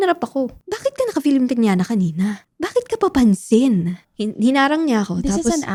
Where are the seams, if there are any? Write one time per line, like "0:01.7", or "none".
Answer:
none